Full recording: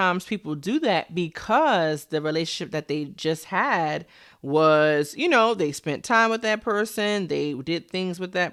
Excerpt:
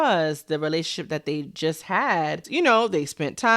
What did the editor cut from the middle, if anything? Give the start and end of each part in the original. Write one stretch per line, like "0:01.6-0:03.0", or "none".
0:04.1-0:05.1